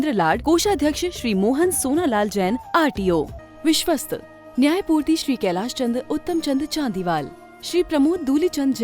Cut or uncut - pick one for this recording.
cut